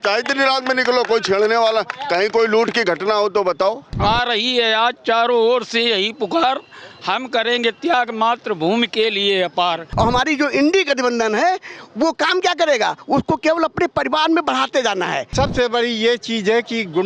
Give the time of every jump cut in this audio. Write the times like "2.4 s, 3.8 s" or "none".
3.9 s, 9.8 s, 15.2 s